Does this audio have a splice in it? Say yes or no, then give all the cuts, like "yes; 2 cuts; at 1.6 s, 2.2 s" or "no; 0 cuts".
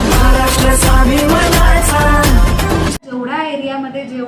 yes; 1 cut; at 3.1 s